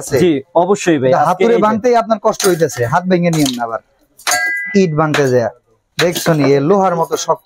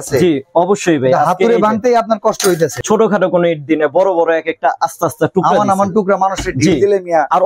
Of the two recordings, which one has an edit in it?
second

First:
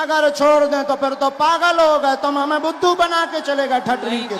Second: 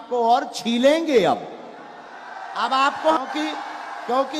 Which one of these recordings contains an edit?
second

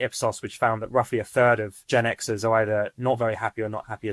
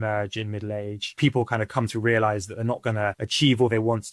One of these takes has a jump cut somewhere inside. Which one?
second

